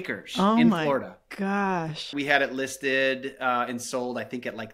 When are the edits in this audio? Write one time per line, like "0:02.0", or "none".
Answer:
0:02.1